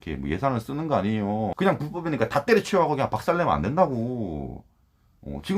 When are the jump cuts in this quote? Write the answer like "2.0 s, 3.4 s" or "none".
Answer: 1.5 s